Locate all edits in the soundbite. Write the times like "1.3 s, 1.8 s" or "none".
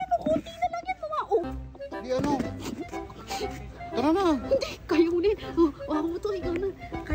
none